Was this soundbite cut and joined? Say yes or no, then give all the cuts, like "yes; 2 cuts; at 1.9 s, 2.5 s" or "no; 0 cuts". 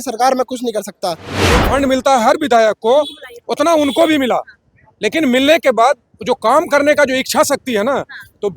yes; 1 cut; at 1.6 s